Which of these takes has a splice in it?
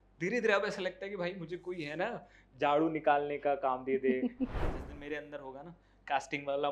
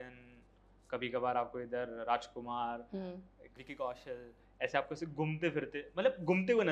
first; 1 cut; at 4.6 s

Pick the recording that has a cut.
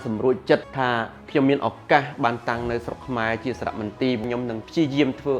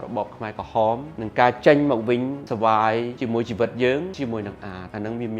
second; 1 cut; at 4.1 s

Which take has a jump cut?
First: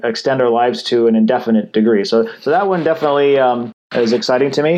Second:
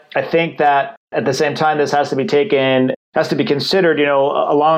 second; 2 cuts; at 1.1 s, 3.0 s

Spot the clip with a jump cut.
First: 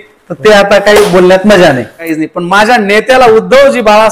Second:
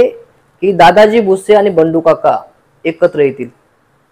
first; 1 cut; at 2.1 s

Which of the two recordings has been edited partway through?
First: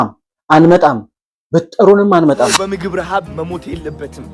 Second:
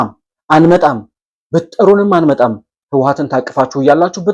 first; 1 cut; at 2.6 s

